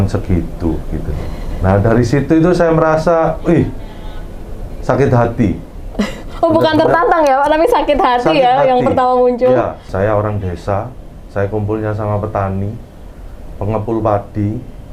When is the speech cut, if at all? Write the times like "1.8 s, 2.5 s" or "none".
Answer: 9.8 s